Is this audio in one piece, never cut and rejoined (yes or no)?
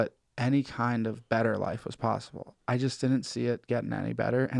yes